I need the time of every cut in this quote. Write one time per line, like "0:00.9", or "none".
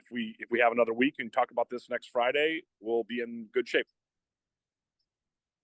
none